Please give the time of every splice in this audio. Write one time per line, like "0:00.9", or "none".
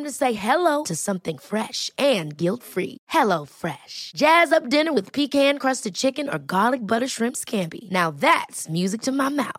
none